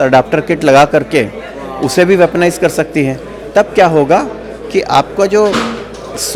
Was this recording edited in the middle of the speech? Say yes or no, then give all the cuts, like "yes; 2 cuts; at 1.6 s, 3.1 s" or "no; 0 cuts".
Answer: no; 0 cuts